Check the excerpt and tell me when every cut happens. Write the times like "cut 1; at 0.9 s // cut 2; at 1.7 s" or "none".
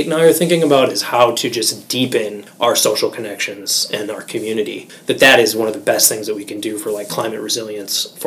cut 1; at 2.4 s // cut 2; at 4.9 s

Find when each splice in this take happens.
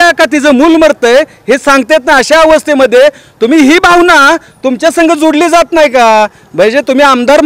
none

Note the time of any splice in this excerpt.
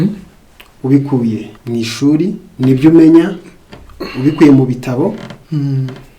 cut 1; at 1.5 s // cut 2; at 2.4 s

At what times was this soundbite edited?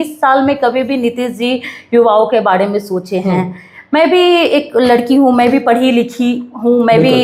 none

